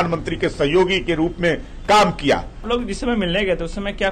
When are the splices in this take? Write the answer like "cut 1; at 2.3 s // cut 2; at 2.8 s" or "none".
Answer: cut 1; at 2.6 s